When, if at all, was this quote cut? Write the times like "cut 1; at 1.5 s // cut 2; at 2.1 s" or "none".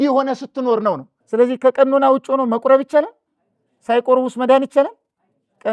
cut 1; at 1.1 s